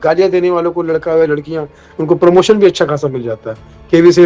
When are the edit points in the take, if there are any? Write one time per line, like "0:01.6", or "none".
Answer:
none